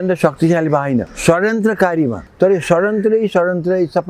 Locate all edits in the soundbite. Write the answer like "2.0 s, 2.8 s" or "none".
1.1 s, 2.2 s